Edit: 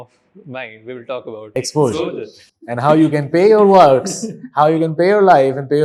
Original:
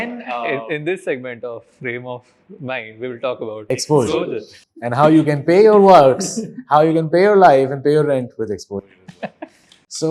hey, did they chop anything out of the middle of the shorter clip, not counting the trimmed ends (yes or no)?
no